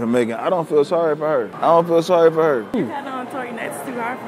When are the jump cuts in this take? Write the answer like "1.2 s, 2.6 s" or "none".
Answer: 1.5 s, 2.7 s